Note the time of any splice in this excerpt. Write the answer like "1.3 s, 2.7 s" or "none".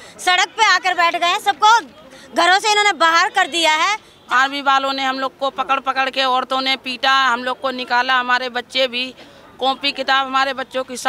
4.1 s